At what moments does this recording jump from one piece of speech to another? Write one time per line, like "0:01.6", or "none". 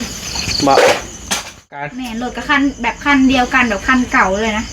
0:02.0